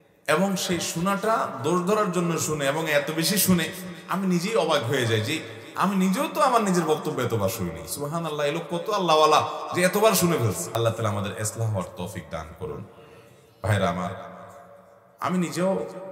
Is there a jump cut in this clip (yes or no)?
yes